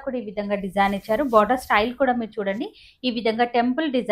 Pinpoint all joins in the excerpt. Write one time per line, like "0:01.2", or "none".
none